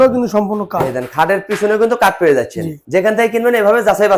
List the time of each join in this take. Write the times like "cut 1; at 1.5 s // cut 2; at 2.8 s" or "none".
none